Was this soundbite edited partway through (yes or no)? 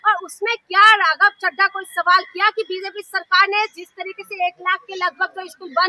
no